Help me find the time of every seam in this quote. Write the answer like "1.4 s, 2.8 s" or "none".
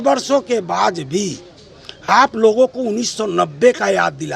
none